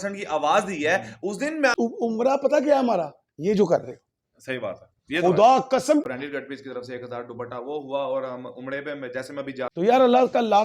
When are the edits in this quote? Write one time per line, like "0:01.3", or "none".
0:01.7
0:06.0
0:09.7